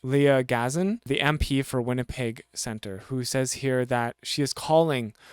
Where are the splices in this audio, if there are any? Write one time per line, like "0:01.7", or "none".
0:01.0